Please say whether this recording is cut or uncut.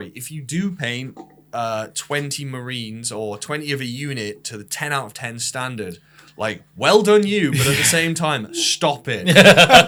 uncut